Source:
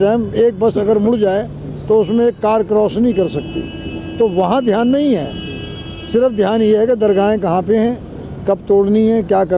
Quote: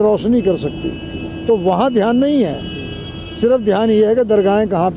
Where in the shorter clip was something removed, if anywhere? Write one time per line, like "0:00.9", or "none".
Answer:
none